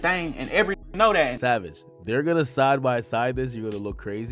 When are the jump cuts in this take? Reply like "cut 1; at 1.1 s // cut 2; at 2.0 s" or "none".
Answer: cut 1; at 1.3 s